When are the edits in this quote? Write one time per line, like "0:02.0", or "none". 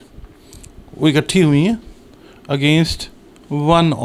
none